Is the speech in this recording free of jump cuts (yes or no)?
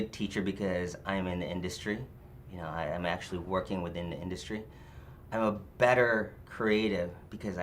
yes